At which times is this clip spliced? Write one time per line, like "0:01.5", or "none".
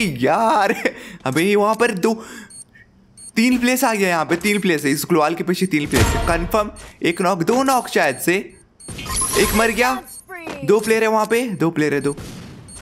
none

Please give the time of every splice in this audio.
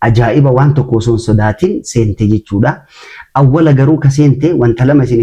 none

